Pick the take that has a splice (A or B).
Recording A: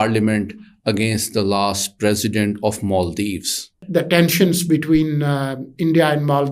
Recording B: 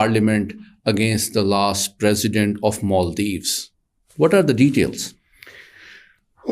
A